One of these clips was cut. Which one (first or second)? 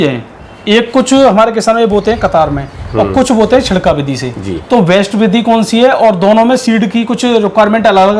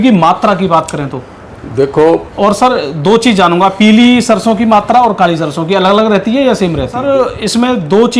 second